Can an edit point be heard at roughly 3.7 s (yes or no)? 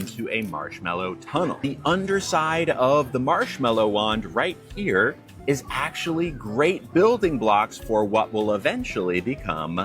no